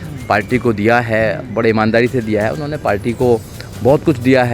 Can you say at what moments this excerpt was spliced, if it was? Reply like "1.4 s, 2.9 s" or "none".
none